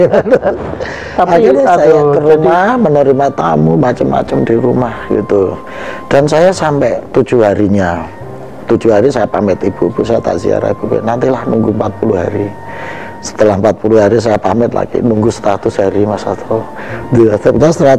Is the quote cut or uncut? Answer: uncut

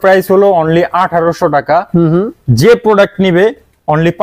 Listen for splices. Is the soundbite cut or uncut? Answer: uncut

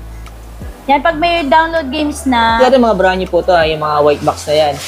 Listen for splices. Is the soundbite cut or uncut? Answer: cut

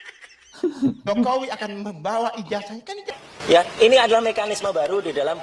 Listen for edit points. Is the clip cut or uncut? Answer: cut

